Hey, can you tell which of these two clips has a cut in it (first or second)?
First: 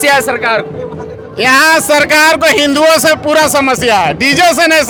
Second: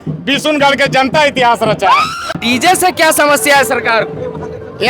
second